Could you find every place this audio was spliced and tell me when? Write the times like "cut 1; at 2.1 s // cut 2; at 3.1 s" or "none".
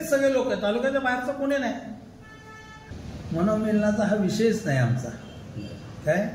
cut 1; at 2.8 s